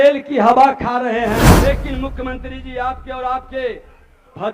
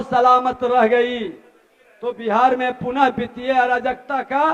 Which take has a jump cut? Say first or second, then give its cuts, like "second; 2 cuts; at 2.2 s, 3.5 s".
first; 1 cut; at 1.5 s